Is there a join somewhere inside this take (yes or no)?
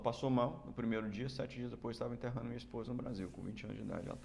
no